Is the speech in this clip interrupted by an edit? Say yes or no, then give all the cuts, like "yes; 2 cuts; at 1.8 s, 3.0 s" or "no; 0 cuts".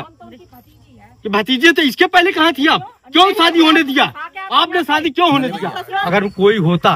yes; 1 cut; at 6.0 s